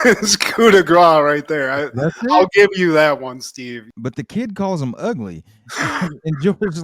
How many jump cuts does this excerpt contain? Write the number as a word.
one